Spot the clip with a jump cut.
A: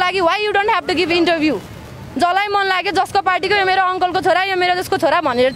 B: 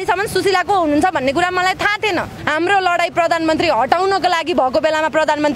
B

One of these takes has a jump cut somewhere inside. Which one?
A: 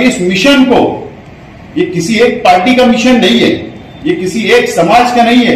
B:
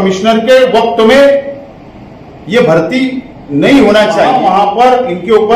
B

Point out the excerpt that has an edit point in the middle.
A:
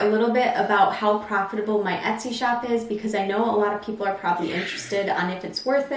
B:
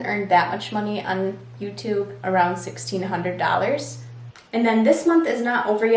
B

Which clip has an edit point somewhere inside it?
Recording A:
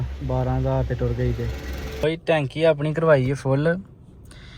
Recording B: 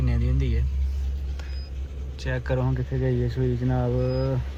A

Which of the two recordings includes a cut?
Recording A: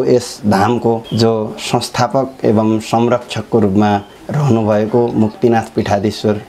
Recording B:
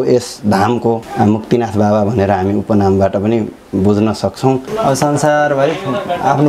B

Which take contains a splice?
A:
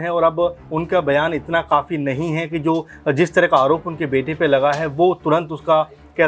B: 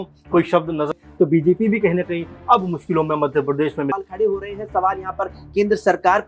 B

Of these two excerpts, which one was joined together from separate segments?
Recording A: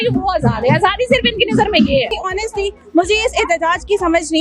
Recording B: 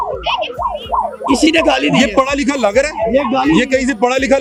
A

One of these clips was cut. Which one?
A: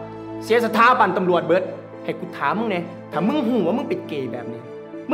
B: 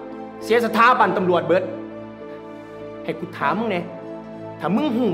A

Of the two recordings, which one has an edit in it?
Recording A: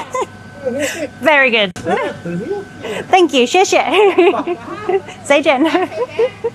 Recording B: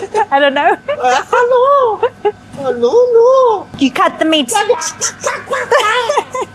B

